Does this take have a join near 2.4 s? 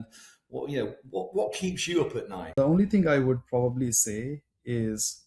yes; 1 cut; at 2.4 s

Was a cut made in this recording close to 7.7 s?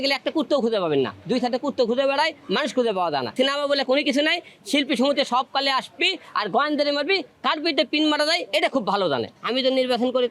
no; 2 cuts; at 3.3 s, 9.3 s

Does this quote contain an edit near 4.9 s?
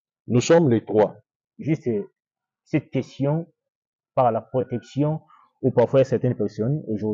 no; 1 cut; at 1.5 s

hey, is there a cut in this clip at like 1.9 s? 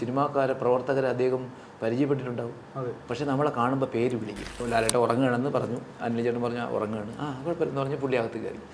no; 1 cut; at 4.6 s

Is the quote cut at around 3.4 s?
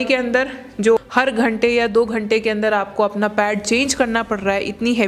no; 1 cut; at 1.0 s

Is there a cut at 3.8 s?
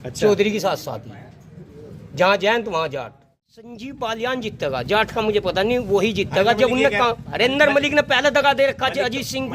yes; 1 cut; at 3.8 s

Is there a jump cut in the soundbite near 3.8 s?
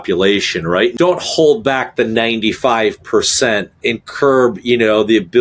yes; 2 cuts; at 0.9 s, 3.8 s

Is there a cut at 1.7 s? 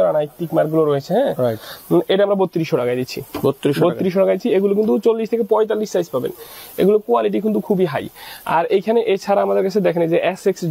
no; 0 cuts

